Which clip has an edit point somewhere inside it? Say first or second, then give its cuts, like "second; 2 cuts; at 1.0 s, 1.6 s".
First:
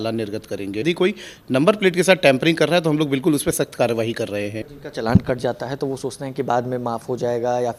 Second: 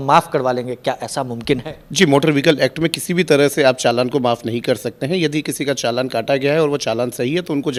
first; 2 cuts; at 0.8 s, 4.8 s